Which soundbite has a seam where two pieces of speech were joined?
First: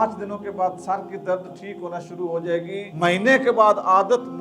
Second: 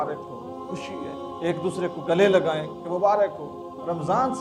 first; 1 cut; at 2.9 s

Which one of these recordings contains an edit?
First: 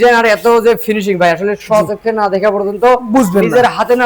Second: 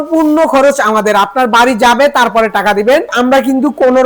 second; 1 cut; at 3.1 s

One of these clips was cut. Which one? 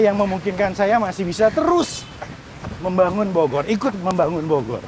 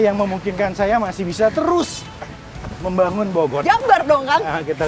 second; 1 cut; at 3.6 s

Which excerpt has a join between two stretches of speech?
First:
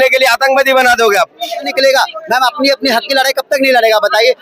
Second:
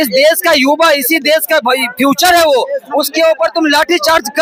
first; 1 cut; at 1.7 s

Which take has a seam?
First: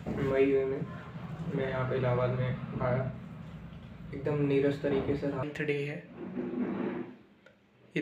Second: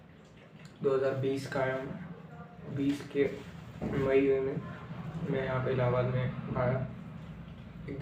first; 1 cut; at 5.4 s

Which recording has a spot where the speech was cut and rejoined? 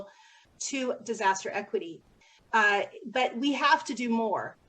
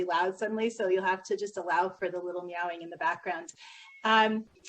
second; 1 cut; at 2.8 s

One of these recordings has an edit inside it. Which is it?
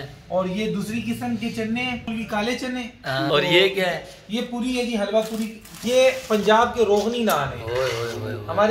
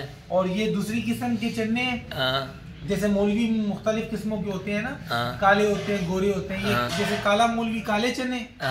first; 3 cuts; at 2.1 s, 3.3 s, 5.8 s

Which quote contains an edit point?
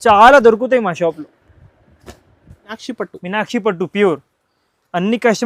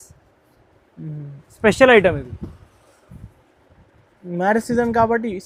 first; 1 cut; at 2.8 s

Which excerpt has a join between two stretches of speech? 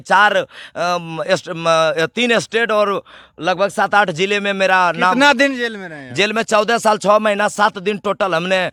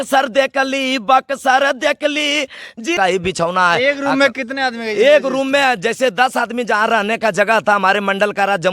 second; 1 cut; at 3.0 s

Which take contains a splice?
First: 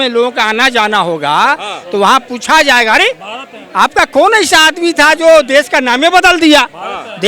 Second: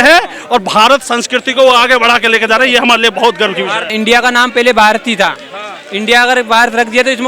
second; 1 cut; at 3.9 s

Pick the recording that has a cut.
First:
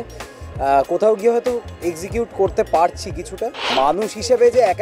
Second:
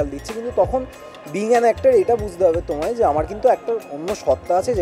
first; 1 cut; at 3.6 s

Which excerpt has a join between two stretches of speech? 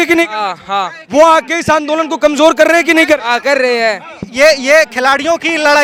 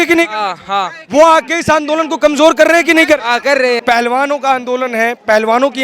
second; 1 cut; at 3.8 s

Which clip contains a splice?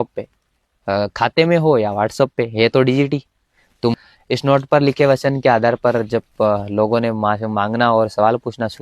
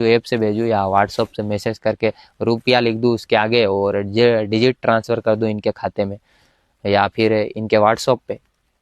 first; 1 cut; at 3.9 s

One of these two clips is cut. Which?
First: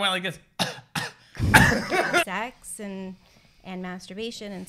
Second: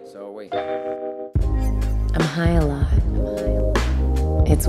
first; 1 cut; at 2.2 s

